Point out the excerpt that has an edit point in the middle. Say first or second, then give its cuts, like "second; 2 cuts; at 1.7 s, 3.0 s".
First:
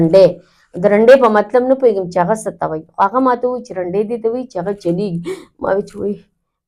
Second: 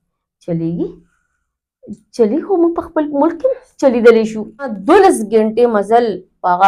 second; 1 cut; at 4.8 s